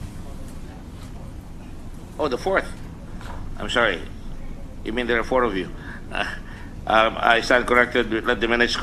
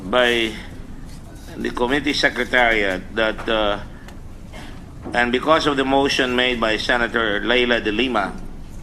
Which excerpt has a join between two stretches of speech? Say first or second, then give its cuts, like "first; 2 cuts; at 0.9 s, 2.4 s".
first; 1 cut; at 4.8 s